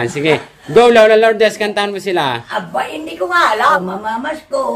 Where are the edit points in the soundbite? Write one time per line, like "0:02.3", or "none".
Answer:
0:03.8